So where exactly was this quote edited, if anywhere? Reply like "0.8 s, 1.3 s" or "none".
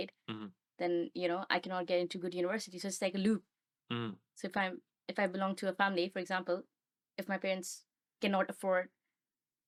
none